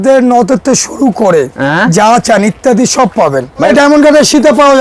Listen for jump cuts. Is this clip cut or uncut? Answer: cut